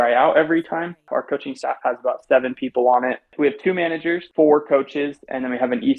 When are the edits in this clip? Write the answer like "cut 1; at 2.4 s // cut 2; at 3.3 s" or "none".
cut 1; at 1.1 s // cut 2; at 3.3 s // cut 3; at 4.3 s